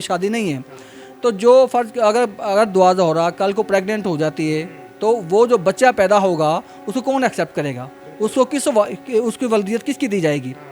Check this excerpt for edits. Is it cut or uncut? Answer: uncut